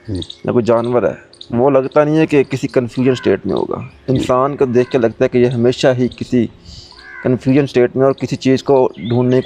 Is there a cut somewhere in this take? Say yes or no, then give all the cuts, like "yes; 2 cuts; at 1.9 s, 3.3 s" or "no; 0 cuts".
no; 0 cuts